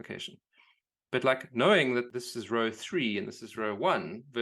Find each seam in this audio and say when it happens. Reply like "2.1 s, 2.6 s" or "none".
2.1 s